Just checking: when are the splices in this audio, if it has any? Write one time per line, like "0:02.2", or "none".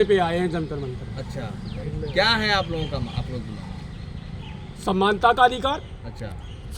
none